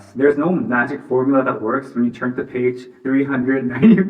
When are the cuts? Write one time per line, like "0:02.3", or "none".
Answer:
none